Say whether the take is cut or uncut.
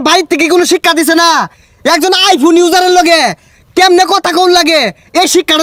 uncut